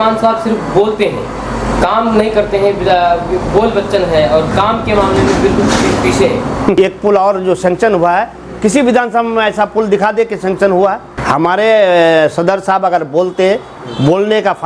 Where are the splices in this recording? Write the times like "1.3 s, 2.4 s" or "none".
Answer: 6.7 s, 11.1 s